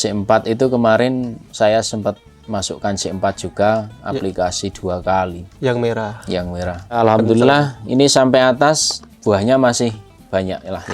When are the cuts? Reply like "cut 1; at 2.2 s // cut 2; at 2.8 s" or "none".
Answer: cut 1; at 7.0 s